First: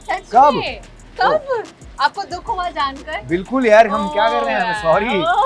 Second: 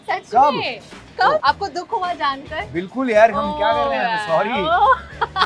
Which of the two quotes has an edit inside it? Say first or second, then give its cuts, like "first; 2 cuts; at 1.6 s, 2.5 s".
second; 1 cut; at 1.4 s